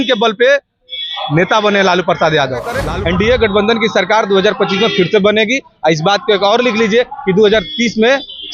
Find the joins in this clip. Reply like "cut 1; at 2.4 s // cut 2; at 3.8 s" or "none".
cut 1; at 2.8 s